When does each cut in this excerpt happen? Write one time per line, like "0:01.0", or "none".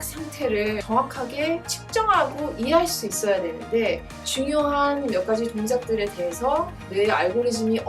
0:00.8
0:01.7
0:04.2